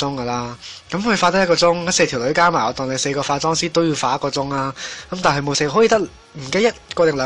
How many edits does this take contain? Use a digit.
0